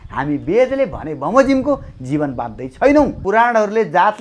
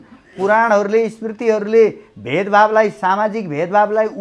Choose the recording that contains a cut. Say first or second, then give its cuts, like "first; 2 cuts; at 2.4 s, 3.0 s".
first; 1 cut; at 3.2 s